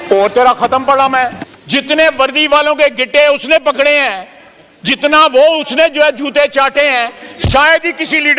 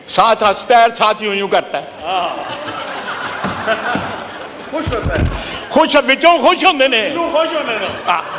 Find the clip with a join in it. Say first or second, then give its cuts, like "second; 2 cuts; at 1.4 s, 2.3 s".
first; 1 cut; at 1.5 s